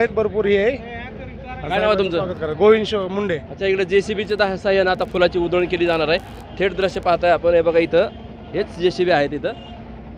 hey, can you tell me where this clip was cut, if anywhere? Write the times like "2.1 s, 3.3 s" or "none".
none